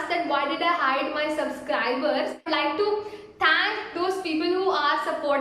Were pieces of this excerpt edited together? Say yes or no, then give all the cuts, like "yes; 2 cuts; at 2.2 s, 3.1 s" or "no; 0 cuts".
yes; 1 cut; at 2.5 s